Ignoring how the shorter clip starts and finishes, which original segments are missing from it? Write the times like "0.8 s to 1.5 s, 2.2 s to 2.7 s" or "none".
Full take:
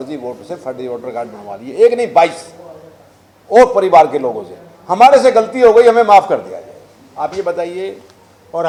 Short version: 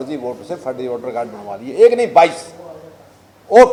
none